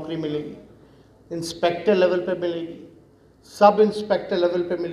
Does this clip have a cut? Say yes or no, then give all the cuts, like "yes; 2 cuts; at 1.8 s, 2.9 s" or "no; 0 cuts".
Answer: no; 0 cuts